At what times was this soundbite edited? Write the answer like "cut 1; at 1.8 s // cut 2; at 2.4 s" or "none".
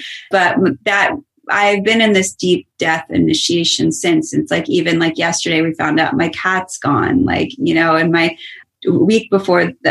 none